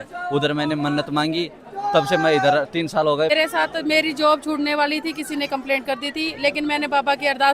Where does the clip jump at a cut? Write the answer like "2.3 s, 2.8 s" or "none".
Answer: 3.3 s